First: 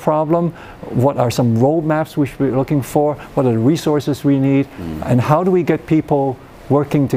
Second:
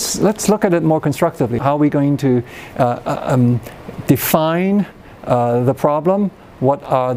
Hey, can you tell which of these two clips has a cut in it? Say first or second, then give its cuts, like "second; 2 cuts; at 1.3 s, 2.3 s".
second; 1 cut; at 1.6 s